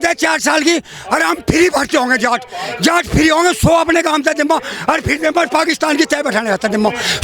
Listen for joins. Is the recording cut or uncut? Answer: uncut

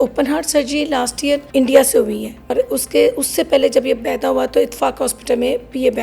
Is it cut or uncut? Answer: cut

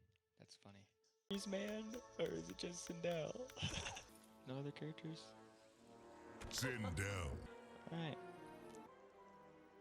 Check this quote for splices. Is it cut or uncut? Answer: cut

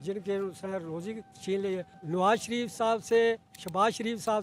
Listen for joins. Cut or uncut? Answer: cut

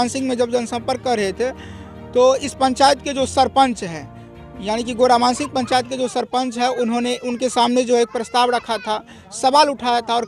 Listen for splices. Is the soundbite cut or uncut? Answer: uncut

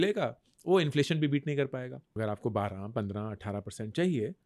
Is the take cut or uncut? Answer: cut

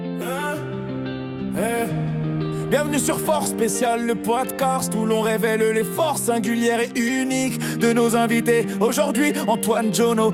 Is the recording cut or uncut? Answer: uncut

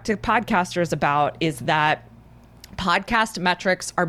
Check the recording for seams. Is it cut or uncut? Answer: uncut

